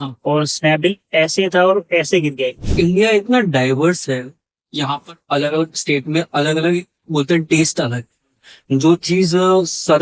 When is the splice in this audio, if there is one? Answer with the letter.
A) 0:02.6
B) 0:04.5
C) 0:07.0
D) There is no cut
A